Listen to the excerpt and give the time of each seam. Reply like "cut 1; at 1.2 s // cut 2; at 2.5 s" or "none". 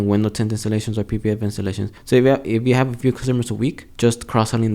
cut 1; at 1.9 s // cut 2; at 3.9 s